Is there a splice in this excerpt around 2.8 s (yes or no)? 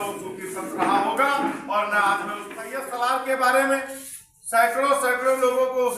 yes